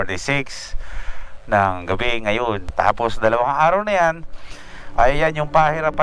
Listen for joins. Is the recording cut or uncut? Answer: cut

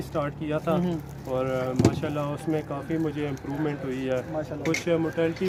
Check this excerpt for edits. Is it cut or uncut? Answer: uncut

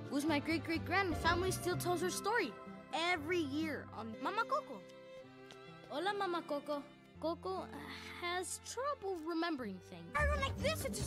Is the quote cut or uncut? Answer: cut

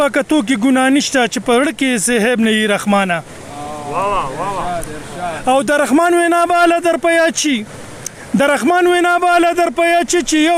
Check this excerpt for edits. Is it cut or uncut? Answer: uncut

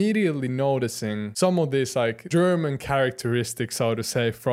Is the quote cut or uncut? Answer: cut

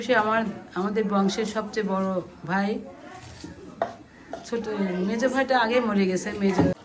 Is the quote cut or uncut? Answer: uncut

